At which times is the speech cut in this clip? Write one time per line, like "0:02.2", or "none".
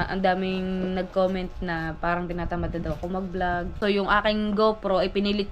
0:03.8

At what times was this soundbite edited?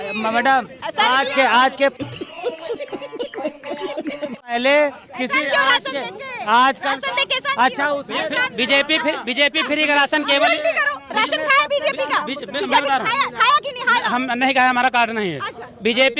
none

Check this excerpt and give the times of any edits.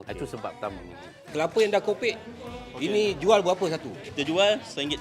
0:01.3
0:04.0

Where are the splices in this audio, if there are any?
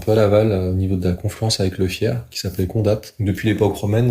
0:03.1

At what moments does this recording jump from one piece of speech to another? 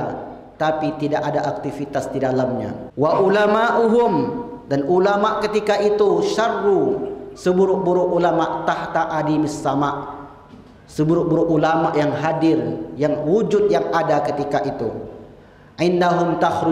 0:02.8

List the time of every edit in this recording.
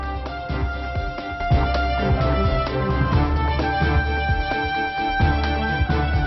0:01.3

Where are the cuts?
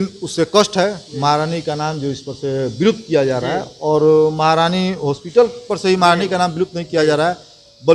none

